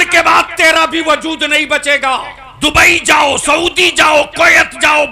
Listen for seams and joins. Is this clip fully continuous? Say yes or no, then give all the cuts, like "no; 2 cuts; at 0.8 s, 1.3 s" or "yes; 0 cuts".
no; 1 cut; at 2.4 s